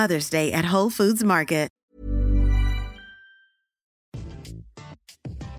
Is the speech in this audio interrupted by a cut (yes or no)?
yes